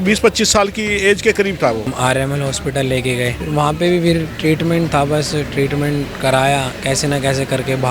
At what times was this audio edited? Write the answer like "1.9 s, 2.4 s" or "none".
1.8 s, 3.4 s